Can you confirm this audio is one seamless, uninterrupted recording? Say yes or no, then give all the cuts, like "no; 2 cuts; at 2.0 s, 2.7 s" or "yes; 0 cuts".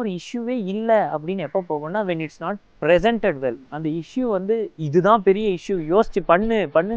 no; 1 cut; at 3.7 s